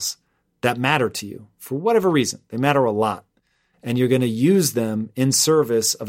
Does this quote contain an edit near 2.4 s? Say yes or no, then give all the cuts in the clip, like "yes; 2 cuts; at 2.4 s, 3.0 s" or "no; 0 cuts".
no; 0 cuts